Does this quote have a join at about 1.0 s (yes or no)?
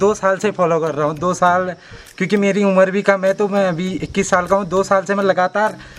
no